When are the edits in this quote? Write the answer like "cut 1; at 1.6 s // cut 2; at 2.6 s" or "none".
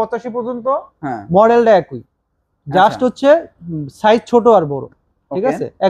none